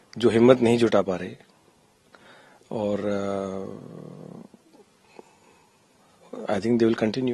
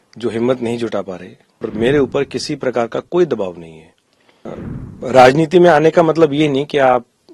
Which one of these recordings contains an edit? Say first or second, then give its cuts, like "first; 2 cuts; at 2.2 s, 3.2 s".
second; 2 cuts; at 1.7 s, 4.6 s